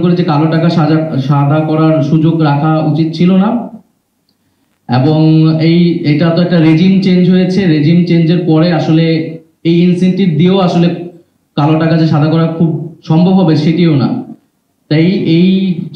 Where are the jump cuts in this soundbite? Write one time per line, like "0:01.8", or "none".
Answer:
none